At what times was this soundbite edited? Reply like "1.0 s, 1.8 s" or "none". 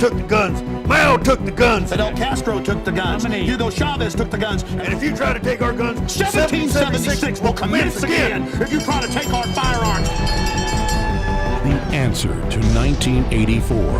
6.0 s